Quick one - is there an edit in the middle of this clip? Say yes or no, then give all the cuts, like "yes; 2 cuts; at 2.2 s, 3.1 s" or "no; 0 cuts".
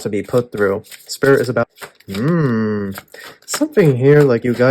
yes; 1 cut; at 1.7 s